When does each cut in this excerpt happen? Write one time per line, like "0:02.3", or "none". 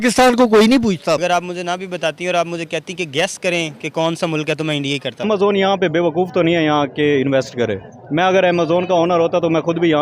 0:01.2
0:05.2